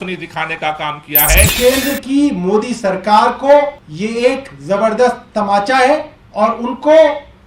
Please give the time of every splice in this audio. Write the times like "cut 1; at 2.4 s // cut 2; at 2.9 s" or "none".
cut 1; at 1.5 s // cut 2; at 3.8 s // cut 3; at 6.2 s